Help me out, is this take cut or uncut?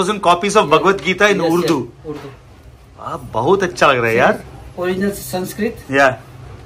uncut